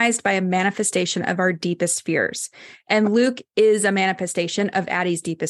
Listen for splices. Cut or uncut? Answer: uncut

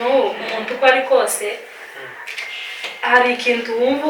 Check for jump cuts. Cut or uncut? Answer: uncut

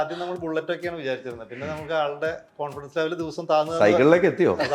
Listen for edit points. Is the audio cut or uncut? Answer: uncut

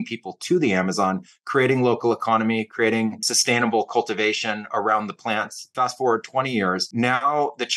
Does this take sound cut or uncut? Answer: cut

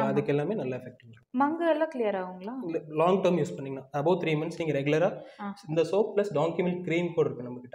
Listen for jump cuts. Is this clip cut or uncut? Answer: uncut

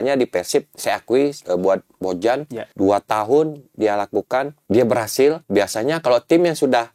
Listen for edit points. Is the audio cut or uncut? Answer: cut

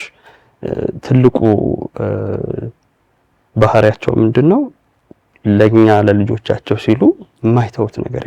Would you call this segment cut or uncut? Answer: uncut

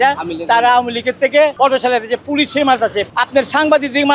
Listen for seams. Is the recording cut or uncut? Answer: cut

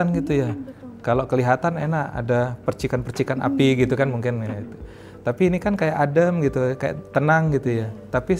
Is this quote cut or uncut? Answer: uncut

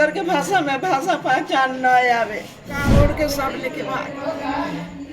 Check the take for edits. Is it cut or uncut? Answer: cut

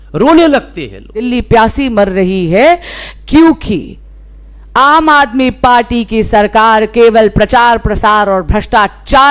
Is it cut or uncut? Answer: cut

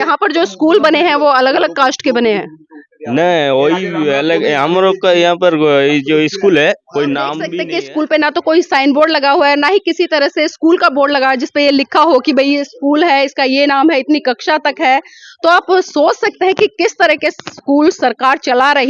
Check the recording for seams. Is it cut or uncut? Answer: cut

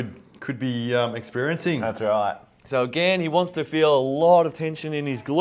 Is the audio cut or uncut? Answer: cut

